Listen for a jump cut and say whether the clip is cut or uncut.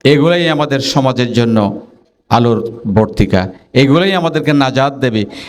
uncut